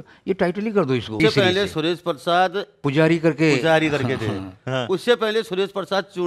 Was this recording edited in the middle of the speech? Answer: yes; 2 cuts; at 1.1 s, 2.8 s

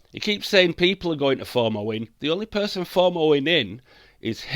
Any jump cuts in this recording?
no; 0 cuts

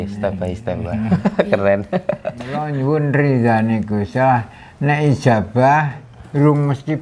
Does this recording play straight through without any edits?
no; 1 cut; at 2.7 s

